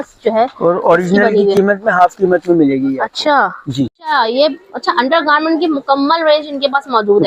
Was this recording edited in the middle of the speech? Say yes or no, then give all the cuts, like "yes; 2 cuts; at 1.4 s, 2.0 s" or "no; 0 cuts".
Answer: yes; 1 cut; at 4.0 s